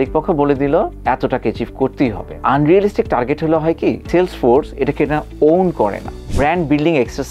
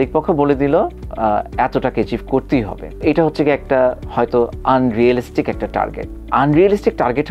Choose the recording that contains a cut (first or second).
first